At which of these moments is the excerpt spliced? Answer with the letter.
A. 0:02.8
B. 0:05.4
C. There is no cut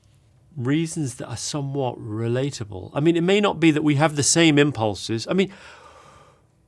C